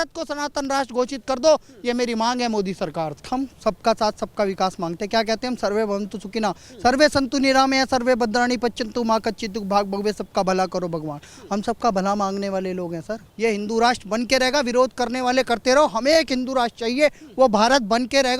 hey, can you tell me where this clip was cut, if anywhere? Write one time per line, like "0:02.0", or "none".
0:03.2
0:13.2